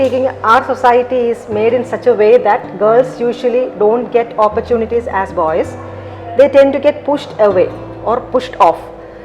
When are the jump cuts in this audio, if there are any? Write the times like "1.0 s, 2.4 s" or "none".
none